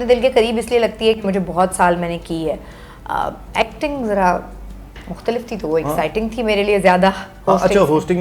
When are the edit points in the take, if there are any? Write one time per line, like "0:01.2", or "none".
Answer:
none